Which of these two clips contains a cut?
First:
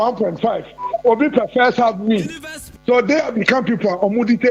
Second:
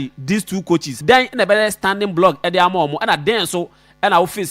second; 1 cut; at 1.0 s

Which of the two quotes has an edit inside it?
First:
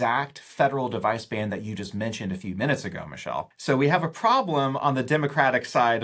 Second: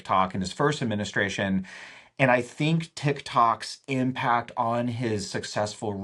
first; 1 cut; at 3.5 s

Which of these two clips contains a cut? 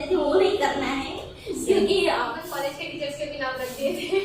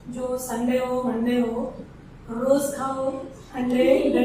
first; 1 cut; at 2.3 s

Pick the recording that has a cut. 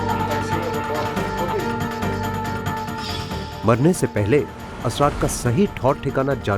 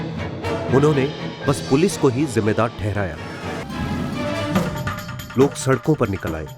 second; 1 cut; at 3.6 s

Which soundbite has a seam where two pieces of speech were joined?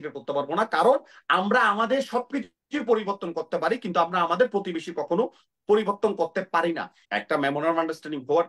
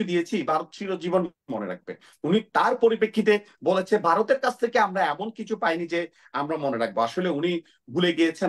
first; 1 cut; at 7.0 s

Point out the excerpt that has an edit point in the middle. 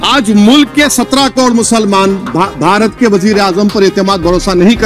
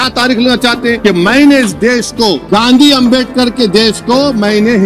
second; 2 cuts; at 1.0 s, 2.4 s

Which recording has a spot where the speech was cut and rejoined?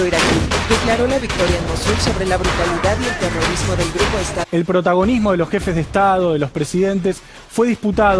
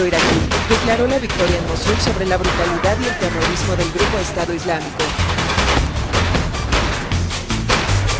second; 1 cut; at 4.5 s

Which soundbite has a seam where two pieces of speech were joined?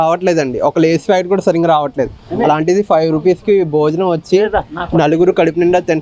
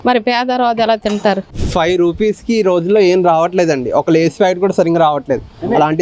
second; 1 cut; at 1.5 s

